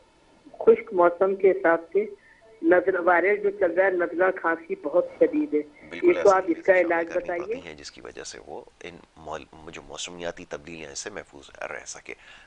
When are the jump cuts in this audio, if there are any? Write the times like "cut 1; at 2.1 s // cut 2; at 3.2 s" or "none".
cut 1; at 7.4 s